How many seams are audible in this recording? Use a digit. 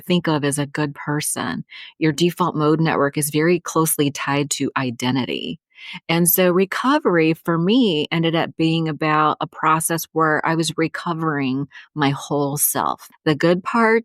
1